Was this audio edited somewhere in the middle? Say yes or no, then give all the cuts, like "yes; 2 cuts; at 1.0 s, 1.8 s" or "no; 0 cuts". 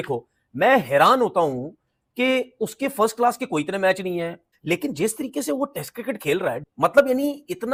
no; 0 cuts